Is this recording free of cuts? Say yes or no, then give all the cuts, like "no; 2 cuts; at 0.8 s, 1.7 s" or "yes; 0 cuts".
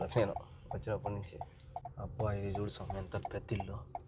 no; 1 cut; at 1.9 s